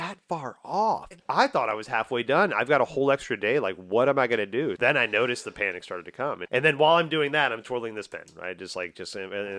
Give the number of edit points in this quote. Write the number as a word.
three